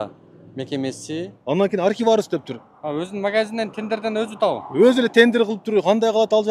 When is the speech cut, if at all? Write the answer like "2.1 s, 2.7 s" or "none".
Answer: 1.3 s